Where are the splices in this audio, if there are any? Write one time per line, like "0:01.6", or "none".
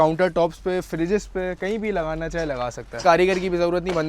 0:03.0